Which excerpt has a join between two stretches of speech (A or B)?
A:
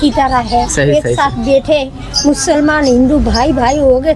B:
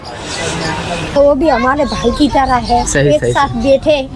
B